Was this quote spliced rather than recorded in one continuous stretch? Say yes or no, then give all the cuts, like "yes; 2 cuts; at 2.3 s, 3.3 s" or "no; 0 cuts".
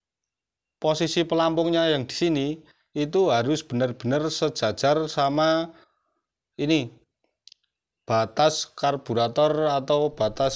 no; 0 cuts